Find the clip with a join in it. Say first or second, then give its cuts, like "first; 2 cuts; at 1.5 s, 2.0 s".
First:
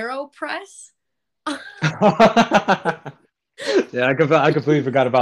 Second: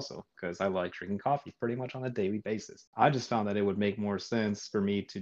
second; 1 cut; at 2.9 s